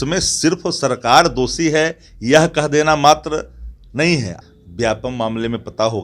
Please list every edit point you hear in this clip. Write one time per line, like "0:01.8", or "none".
0:04.4